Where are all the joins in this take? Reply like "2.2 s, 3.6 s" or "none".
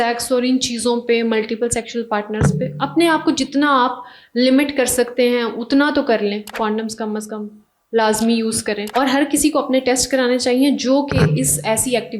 6.5 s, 8.8 s